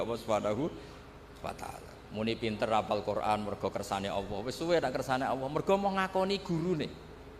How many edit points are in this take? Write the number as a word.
one